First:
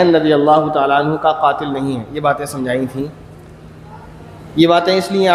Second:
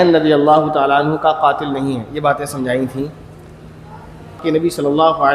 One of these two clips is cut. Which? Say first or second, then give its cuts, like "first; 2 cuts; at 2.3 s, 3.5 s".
second; 1 cut; at 4.4 s